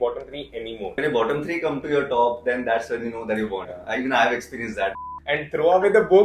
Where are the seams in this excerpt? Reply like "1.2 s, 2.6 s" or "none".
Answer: 1.0 s, 3.7 s, 5.0 s